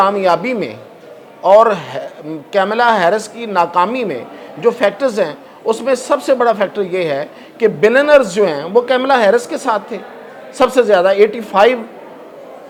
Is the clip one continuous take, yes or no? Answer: yes